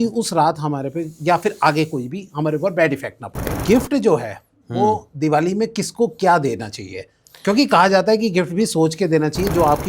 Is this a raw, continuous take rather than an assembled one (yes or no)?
no